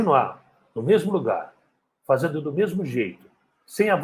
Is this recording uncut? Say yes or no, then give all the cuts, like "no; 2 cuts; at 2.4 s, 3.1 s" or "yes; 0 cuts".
yes; 0 cuts